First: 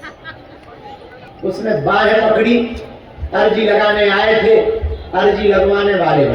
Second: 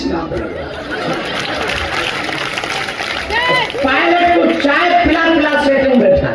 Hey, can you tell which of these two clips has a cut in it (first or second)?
first